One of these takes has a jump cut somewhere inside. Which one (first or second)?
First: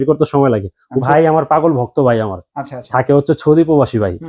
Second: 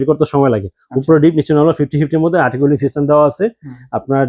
first